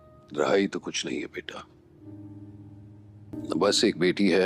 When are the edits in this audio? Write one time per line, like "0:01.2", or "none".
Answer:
0:02.0